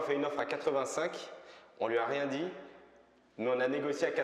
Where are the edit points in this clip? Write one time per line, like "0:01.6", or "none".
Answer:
none